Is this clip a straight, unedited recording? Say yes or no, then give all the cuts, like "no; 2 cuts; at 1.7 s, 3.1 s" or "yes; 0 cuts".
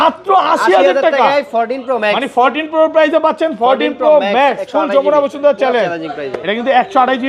yes; 0 cuts